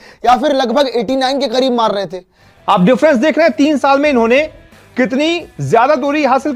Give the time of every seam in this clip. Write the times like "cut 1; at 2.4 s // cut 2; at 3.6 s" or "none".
cut 1; at 2.6 s